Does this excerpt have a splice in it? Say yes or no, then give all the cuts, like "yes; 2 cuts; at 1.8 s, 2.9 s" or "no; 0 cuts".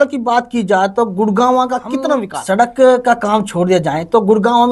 yes; 1 cut; at 2.3 s